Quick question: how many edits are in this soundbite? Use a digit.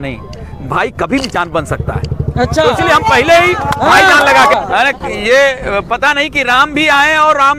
1